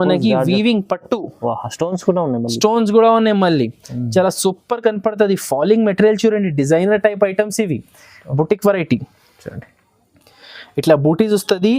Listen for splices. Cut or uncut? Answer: uncut